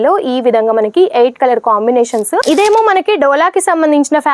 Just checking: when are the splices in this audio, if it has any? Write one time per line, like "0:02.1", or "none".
0:02.4